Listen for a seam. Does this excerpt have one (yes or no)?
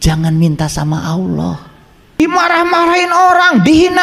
yes